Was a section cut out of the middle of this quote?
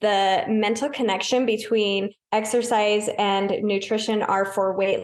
yes; 1 cut; at 2.2 s

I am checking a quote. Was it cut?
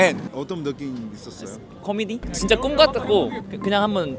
yes; 1 cut; at 2.2 s

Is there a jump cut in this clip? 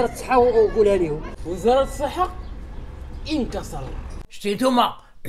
yes; 1 cut; at 4.2 s

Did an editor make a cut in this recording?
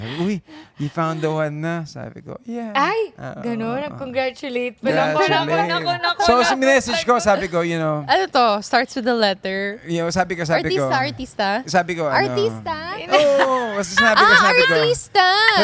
no; 0 cuts

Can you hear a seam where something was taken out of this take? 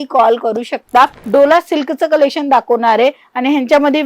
yes; 1 cut; at 1.2 s

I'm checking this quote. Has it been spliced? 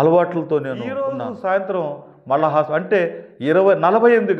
yes; 1 cut; at 1.1 s

